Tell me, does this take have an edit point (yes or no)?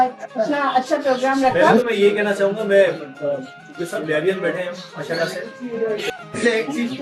yes